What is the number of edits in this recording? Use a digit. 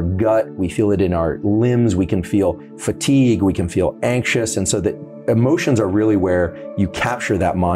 1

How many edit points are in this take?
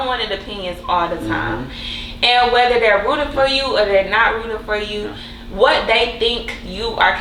0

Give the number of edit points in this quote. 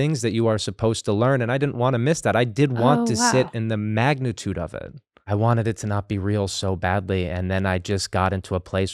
1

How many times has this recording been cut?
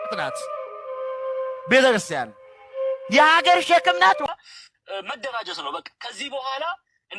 1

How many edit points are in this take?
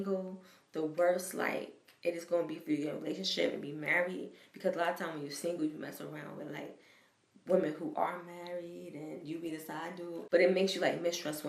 1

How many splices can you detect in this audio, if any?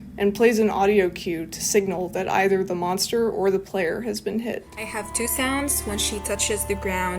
1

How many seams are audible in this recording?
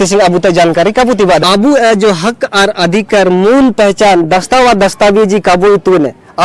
1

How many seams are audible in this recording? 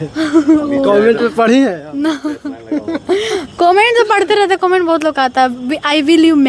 0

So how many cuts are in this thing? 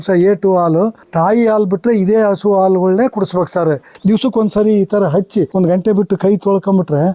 3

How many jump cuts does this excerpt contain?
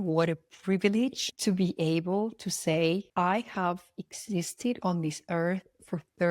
1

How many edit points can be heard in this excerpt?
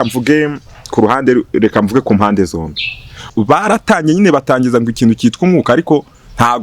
1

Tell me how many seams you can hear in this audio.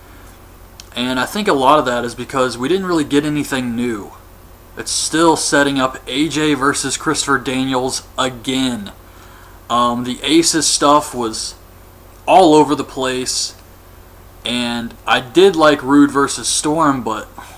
1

